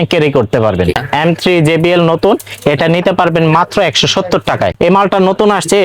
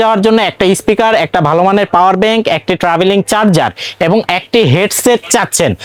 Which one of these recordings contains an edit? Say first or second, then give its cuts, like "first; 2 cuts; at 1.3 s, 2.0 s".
first; 2 cuts; at 1.0 s, 4.7 s